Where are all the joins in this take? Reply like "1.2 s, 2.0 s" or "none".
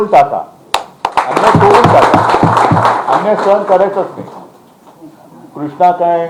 none